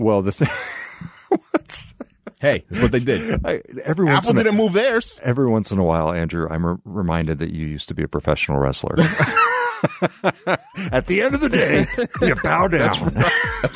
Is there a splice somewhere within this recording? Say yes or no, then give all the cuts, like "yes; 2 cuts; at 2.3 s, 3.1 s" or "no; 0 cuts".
no; 0 cuts